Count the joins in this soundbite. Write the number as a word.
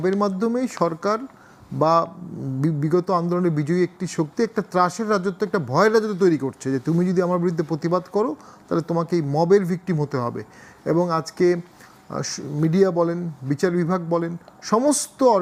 zero